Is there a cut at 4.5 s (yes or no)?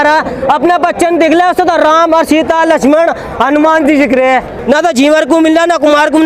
yes